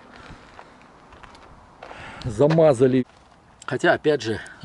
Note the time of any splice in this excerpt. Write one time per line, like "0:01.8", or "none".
0:03.0